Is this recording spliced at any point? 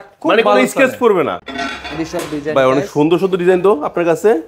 yes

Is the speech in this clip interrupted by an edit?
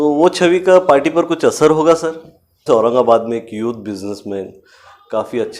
yes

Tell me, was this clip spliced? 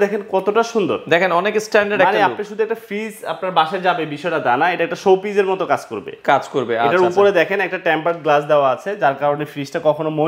no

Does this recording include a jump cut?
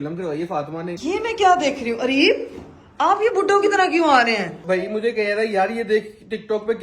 yes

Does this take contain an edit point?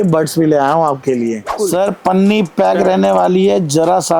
yes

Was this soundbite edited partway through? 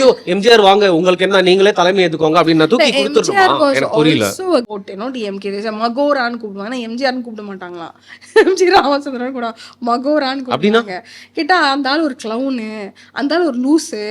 yes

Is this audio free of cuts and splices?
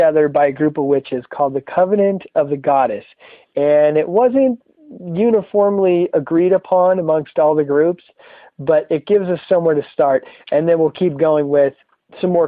no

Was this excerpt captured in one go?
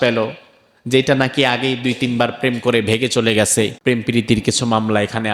no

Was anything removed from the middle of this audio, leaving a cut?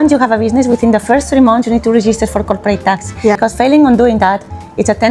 yes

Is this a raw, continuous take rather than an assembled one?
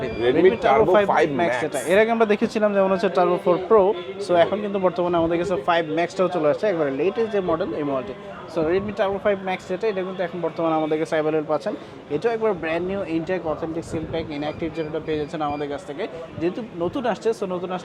yes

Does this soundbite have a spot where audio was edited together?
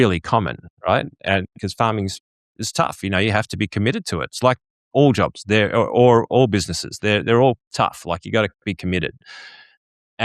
no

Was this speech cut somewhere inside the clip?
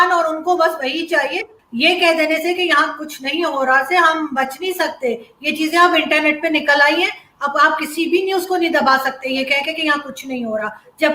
yes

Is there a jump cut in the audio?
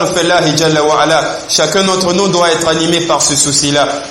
no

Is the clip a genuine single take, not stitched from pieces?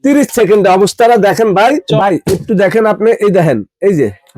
no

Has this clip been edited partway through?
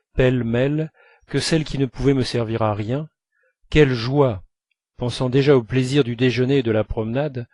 no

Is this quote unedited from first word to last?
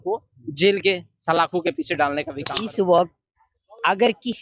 no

